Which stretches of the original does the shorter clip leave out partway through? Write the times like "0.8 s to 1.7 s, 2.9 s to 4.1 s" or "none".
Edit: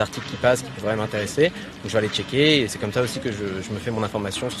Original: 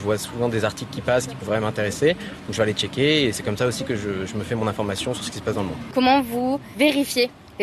none